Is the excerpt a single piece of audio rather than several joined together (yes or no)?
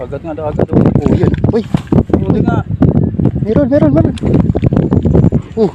yes